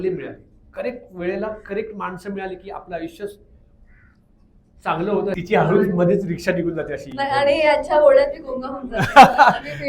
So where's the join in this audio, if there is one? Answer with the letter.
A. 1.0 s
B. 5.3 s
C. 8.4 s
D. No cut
B